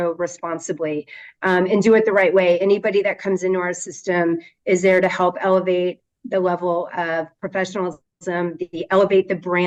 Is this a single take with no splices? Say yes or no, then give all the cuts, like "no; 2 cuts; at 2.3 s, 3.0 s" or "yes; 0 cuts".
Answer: yes; 0 cuts